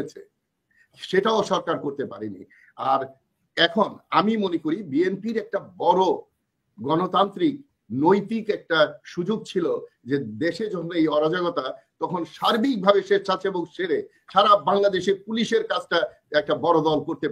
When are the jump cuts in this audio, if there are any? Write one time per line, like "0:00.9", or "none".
none